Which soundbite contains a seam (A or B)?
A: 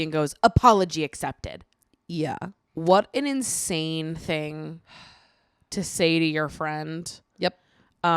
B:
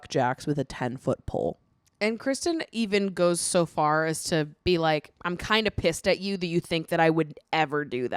A